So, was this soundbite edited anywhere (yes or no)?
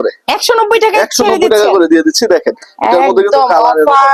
no